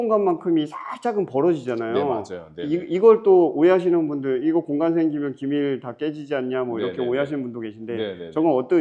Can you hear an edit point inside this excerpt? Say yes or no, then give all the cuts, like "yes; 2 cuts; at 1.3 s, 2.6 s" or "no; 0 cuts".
no; 0 cuts